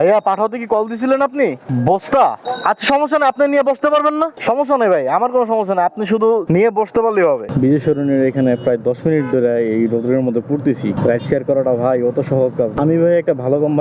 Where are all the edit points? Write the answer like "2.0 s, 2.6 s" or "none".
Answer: 1.6 s, 2.5 s, 4.4 s, 7.5 s, 11.0 s, 12.7 s